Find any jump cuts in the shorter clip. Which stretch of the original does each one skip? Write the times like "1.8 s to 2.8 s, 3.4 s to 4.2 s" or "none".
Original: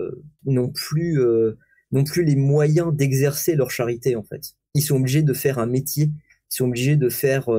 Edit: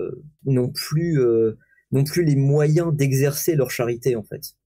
none

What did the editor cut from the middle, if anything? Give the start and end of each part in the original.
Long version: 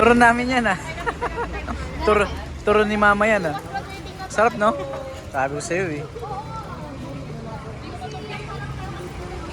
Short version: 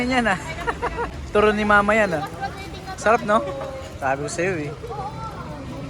1.5 s to 2.5 s

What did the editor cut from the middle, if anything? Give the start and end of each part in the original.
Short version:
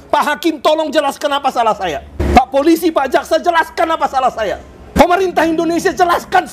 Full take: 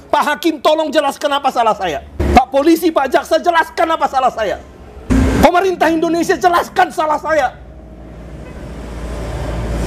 4.9 s to 5.4 s

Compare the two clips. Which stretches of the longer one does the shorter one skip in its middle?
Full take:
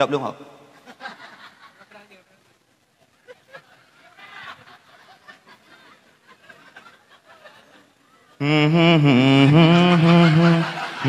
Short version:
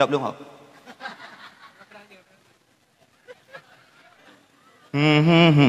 4.2 s to 7.6 s

